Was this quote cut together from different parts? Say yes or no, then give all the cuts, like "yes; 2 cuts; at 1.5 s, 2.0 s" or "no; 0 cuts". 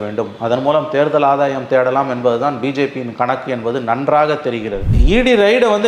yes; 1 cut; at 4.9 s